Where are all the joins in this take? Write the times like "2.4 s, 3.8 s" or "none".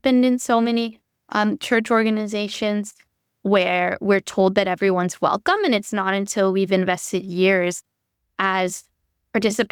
none